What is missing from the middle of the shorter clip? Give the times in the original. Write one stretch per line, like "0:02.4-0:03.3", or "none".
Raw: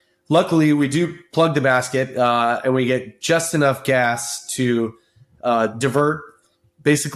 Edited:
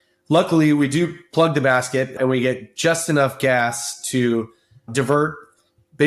0:02.1-0:02.6
0:05.3-0:05.8